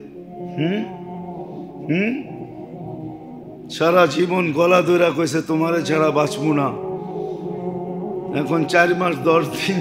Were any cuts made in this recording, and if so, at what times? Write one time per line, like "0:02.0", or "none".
none